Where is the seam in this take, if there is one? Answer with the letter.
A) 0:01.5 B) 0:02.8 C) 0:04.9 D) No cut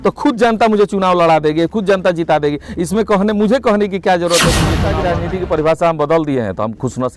C